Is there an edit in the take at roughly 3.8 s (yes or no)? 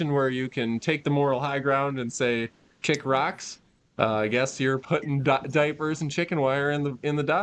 no